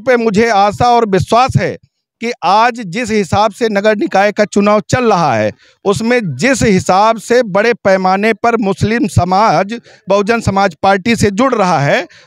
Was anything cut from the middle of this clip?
no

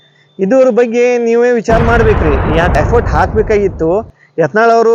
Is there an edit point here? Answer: yes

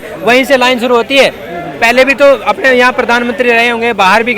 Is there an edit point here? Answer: no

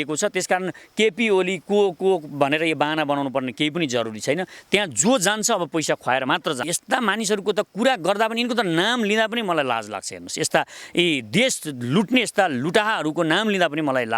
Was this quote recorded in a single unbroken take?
no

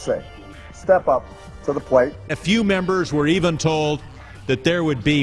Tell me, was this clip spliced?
yes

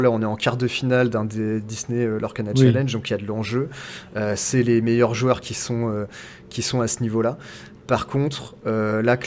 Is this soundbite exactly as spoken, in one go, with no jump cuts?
yes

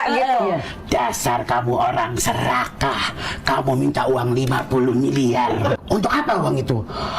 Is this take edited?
yes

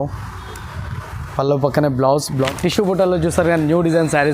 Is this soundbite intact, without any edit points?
no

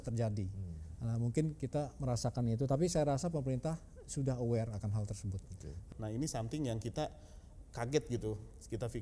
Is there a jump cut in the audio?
yes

